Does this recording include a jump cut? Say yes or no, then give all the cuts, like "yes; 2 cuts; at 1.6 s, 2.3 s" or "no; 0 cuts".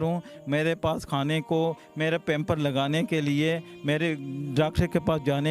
no; 0 cuts